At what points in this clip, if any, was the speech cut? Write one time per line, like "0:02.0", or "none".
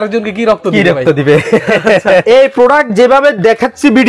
0:02.2